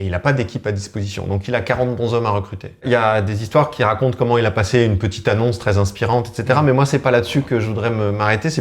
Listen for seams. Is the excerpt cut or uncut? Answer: cut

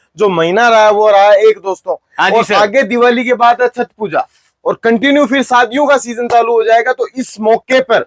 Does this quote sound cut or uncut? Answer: uncut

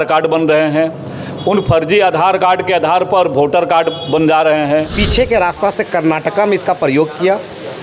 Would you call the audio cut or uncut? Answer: cut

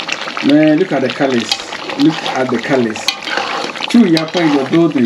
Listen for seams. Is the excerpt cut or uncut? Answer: cut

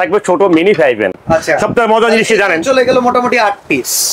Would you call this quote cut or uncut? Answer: uncut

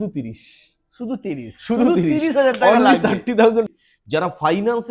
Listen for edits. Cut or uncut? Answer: cut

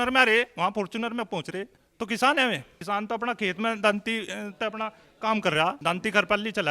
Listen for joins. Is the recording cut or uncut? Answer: cut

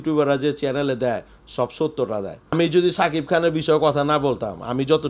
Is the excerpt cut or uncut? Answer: cut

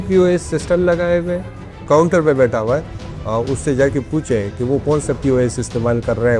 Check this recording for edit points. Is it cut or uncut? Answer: cut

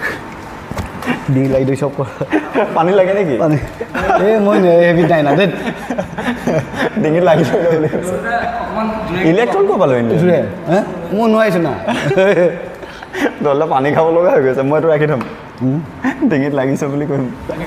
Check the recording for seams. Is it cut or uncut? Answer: uncut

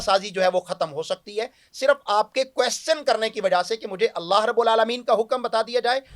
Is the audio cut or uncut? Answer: uncut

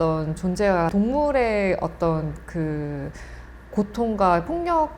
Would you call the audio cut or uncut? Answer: cut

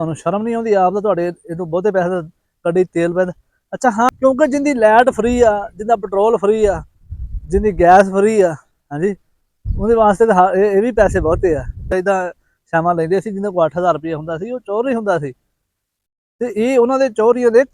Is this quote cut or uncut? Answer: cut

